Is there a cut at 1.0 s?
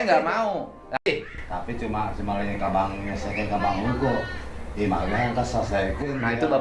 yes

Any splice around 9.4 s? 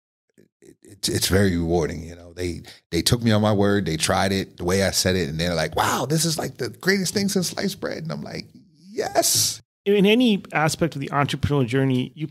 yes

